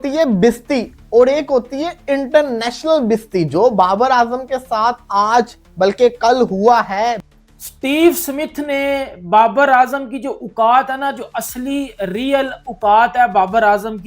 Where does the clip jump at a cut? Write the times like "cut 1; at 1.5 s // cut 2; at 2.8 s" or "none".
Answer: cut 1; at 7.3 s